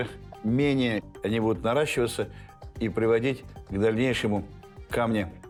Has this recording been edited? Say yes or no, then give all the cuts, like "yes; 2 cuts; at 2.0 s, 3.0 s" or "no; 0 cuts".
no; 0 cuts